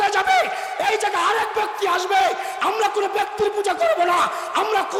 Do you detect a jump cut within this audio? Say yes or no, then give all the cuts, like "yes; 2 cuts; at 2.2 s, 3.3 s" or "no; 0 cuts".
no; 0 cuts